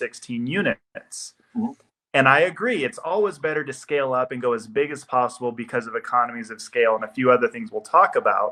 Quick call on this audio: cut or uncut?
uncut